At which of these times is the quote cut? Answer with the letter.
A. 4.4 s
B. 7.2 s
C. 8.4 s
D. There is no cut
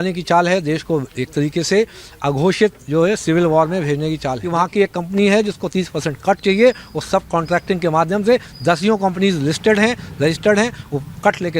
A